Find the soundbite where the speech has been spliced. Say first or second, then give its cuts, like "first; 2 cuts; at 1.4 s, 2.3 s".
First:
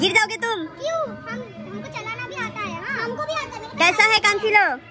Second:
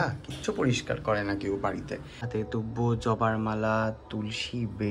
second; 1 cut; at 2.1 s